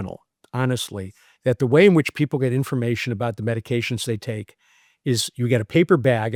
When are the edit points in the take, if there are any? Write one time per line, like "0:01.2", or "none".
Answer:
none